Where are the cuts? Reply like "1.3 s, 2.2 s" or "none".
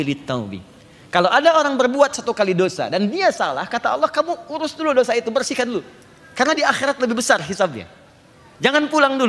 none

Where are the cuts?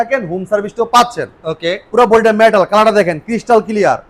none

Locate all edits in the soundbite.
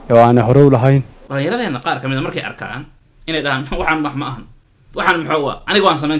1.3 s

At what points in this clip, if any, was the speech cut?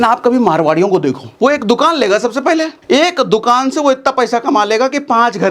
1.3 s, 2.8 s

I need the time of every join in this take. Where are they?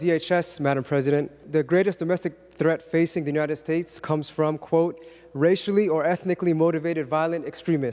1.4 s

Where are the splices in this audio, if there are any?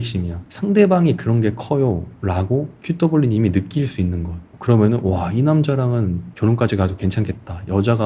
6.3 s

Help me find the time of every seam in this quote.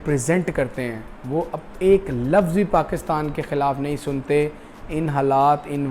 none

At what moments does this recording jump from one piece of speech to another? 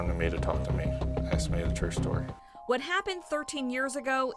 none

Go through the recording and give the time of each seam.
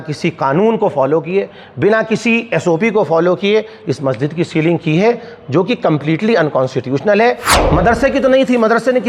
7.5 s

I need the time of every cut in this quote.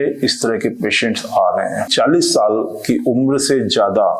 1.9 s

